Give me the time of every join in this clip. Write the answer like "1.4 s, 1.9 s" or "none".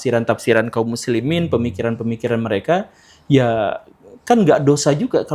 none